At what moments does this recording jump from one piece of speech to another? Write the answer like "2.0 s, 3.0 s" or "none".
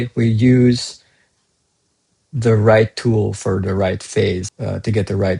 4.5 s